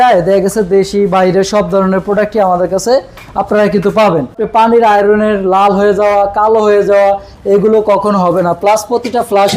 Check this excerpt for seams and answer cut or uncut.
cut